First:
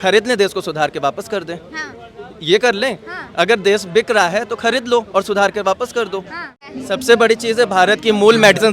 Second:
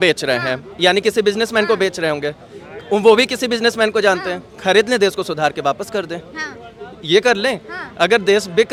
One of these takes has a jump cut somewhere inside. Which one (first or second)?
first